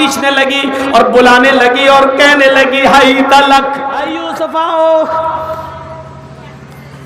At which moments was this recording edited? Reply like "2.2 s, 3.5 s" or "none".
4.2 s